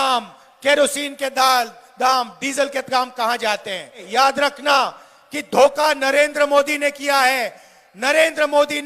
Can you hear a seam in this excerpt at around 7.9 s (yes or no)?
no